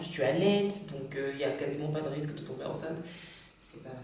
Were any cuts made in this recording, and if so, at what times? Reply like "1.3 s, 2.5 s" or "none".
none

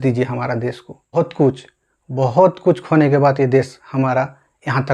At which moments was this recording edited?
1.1 s

